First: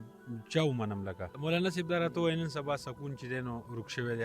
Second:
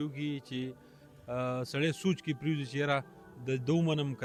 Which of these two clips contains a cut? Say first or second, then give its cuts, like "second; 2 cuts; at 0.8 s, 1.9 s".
first; 1 cut; at 1.4 s